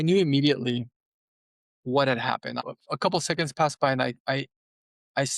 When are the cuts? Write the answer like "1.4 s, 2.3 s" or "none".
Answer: 2.6 s